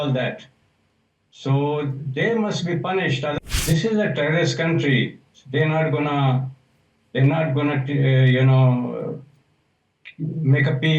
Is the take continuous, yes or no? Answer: no